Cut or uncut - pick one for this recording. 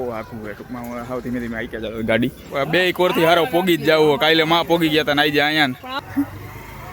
cut